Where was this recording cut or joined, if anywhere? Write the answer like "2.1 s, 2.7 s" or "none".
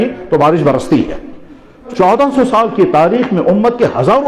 1.8 s

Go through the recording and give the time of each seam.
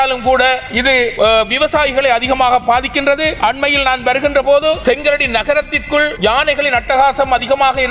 0.9 s, 3.3 s, 4.8 s, 6.1 s

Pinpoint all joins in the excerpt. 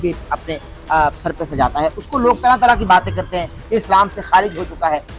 3.6 s

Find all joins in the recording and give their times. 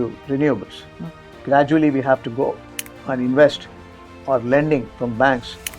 1.4 s

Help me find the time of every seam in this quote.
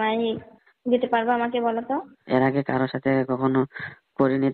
2.2 s

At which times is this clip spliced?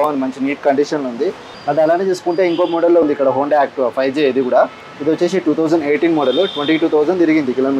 1.5 s

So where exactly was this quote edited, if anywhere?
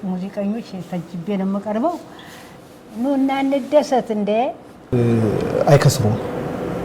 4.8 s

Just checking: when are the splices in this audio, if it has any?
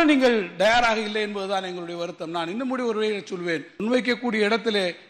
3.7 s

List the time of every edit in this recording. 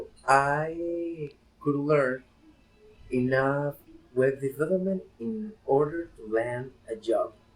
5.1 s

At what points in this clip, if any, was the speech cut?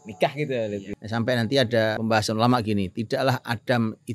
1.0 s, 2.0 s

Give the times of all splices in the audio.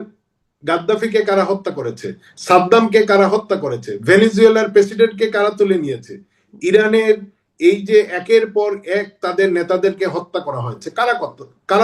none

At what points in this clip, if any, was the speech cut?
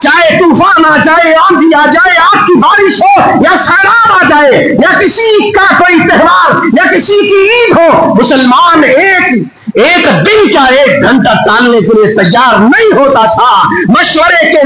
none

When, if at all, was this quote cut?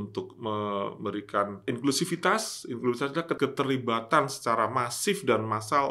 1.6 s, 3.4 s

